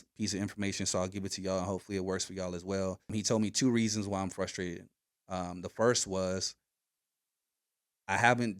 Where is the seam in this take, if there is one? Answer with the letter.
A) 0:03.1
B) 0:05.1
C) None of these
A